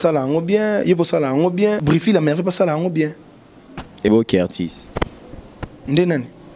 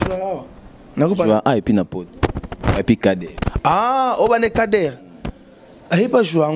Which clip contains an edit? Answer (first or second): first